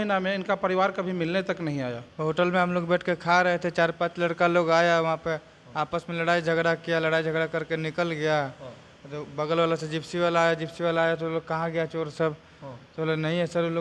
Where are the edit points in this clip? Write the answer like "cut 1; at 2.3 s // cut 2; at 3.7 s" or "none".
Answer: cut 1; at 2.0 s